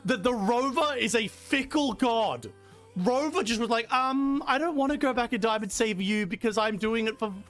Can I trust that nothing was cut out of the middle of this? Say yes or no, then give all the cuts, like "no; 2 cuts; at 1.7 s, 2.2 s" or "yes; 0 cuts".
yes; 0 cuts